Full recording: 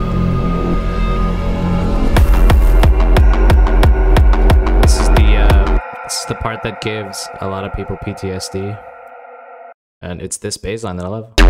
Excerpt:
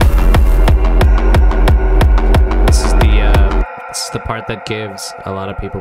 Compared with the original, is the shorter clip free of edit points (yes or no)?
yes